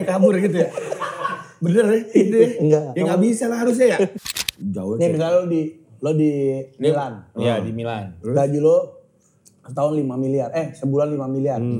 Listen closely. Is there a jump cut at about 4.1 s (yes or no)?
yes